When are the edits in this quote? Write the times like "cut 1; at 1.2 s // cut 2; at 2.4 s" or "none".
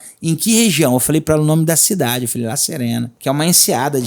cut 1; at 3.1 s